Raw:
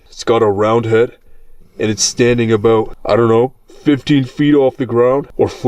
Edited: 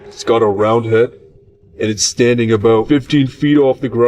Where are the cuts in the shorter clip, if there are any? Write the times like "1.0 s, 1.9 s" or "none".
2.8 s